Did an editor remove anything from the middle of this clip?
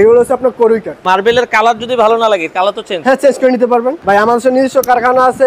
yes; 2 cuts; at 0.9 s, 4.0 s

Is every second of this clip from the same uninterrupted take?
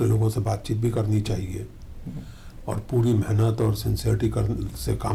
yes; 0 cuts

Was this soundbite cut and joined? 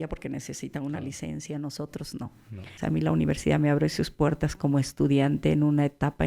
yes; 1 cut; at 2.8 s

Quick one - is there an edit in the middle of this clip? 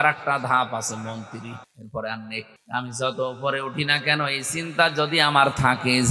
yes; 2 cuts; at 1.7 s, 2.6 s

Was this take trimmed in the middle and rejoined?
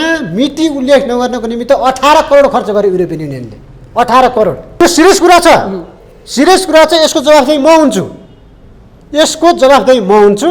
yes; 1 cut; at 4.8 s

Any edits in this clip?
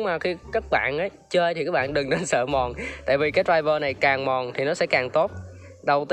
no; 0 cuts

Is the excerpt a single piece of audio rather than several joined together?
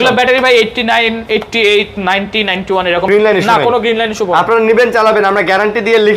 no; 1 cut; at 3.1 s

